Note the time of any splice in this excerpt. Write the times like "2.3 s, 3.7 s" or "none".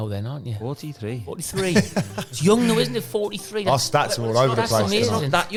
none